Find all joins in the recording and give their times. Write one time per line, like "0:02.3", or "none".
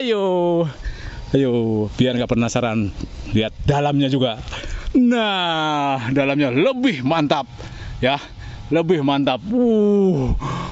none